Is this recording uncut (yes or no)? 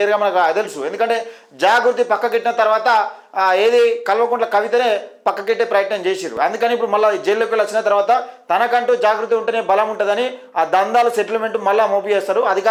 yes